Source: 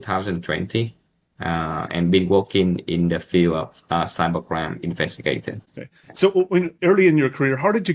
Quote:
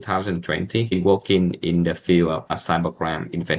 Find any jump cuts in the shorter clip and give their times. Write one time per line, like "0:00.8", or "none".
0:00.9
0:02.6